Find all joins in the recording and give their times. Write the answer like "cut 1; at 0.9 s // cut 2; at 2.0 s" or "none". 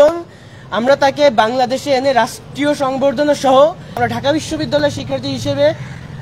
cut 1; at 4.0 s